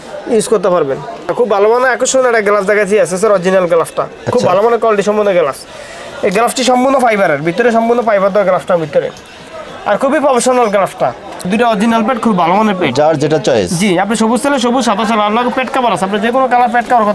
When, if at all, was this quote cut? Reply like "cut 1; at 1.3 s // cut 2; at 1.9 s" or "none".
cut 1; at 1.3 s // cut 2; at 11.4 s